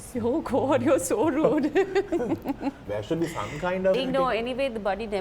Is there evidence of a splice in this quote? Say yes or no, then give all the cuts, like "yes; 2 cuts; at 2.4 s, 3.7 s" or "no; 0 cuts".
yes; 2 cuts; at 2.8 s, 4.0 s